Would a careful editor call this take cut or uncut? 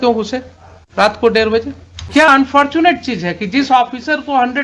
cut